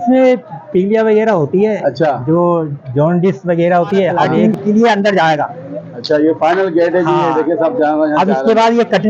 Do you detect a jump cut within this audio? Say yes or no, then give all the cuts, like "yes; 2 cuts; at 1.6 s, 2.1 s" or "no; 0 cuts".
yes; 1 cut; at 4.4 s